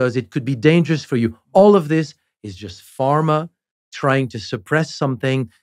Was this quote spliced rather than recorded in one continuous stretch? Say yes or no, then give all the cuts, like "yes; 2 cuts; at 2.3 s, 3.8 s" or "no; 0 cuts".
no; 0 cuts